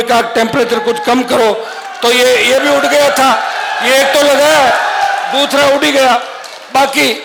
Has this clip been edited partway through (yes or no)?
no